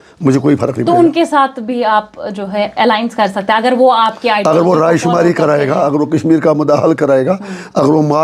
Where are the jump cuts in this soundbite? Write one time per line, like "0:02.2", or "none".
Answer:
none